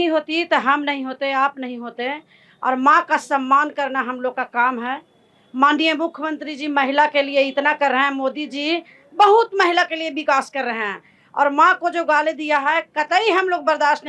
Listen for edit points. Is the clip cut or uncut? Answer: uncut